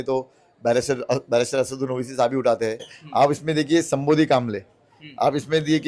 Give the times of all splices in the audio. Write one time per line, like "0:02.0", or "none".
0:03.0